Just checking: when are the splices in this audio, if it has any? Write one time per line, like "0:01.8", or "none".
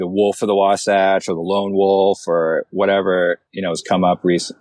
0:03.5

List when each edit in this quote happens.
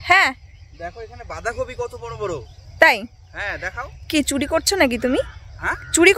none

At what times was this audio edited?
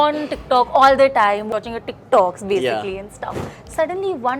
0:01.5

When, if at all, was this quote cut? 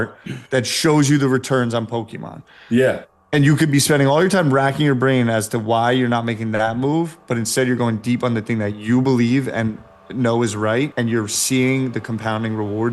0:10.9

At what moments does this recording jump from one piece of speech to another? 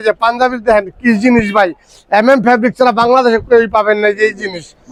none

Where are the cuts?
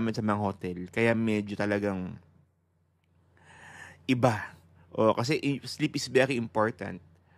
none

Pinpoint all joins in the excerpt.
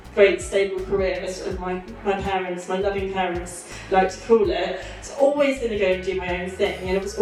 none

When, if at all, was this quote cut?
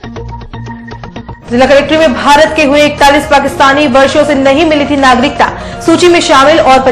0:01.1

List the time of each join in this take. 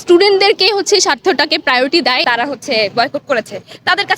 0:02.2

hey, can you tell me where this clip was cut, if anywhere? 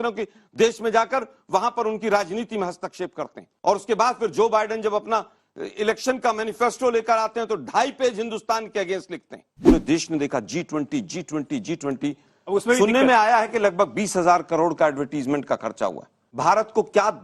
0:09.6

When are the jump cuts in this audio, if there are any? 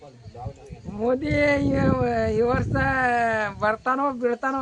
none

